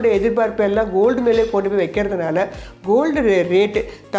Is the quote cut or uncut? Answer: uncut